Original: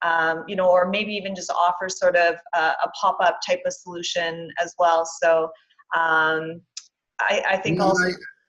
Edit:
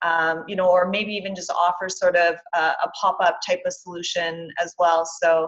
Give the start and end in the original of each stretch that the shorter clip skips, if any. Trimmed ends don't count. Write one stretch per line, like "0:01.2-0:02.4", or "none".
none